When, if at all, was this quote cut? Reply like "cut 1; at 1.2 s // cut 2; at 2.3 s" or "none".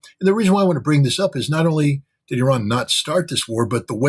none